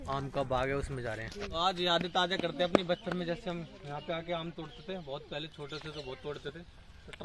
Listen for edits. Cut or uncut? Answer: cut